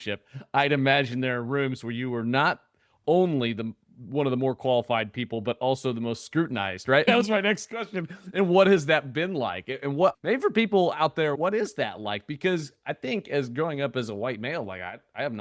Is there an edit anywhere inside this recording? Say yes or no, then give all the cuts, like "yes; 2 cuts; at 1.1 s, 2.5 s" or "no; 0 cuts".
yes; 3 cuts; at 7.0 s, 10.1 s, 11.4 s